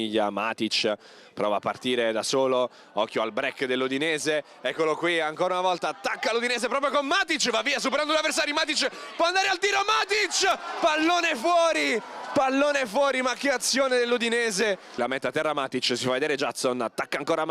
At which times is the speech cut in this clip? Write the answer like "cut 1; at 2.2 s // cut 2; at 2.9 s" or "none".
none